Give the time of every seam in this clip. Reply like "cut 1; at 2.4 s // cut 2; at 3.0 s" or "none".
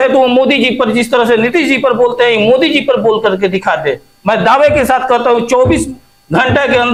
none